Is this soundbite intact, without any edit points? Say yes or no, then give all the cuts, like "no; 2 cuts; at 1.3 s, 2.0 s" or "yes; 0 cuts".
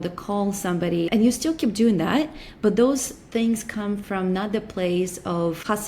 no; 1 cut; at 1.1 s